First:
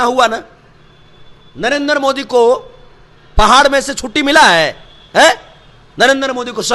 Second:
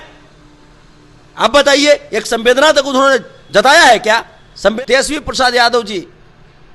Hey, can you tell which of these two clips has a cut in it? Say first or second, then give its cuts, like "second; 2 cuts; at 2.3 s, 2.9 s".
second; 1 cut; at 4.7 s